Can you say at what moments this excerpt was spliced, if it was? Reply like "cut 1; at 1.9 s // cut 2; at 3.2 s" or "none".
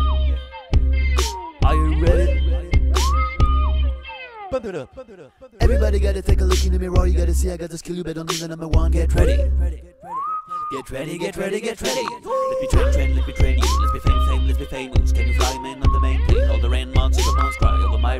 none